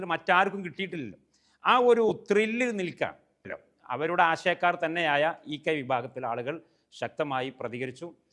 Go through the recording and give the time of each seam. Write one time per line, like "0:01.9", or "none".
0:03.6